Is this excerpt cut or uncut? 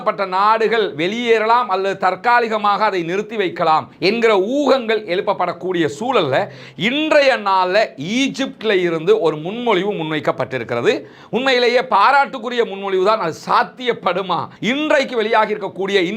cut